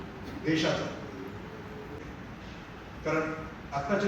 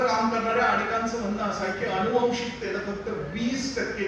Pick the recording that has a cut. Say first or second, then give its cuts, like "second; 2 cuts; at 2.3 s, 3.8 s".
first; 1 cut; at 2.0 s